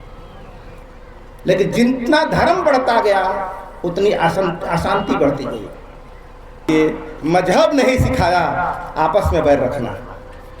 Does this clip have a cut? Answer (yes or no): yes